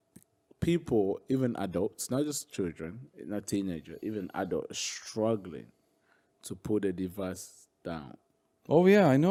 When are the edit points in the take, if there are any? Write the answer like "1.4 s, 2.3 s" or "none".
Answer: none